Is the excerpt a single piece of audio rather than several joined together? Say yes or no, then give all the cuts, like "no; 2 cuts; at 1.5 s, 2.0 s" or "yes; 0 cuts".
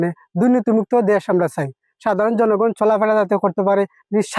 yes; 0 cuts